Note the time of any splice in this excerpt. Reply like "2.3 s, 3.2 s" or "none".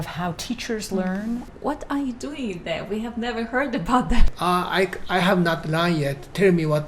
1.5 s, 4.3 s